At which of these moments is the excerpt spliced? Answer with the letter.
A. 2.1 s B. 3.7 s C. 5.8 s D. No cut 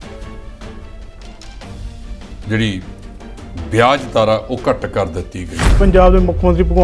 C